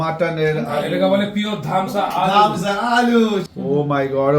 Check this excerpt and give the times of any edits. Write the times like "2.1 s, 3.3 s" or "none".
3.5 s